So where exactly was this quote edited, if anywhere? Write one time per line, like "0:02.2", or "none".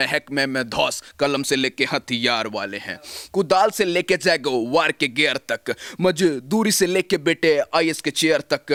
none